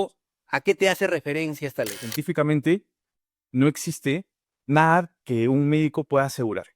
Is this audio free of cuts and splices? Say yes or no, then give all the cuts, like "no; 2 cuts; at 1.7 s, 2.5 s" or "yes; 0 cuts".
no; 1 cut; at 2.1 s